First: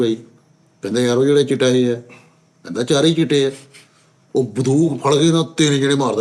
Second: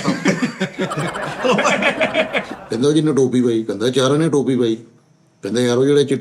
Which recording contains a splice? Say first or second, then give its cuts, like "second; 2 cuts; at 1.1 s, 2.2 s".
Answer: second; 1 cut; at 2.5 s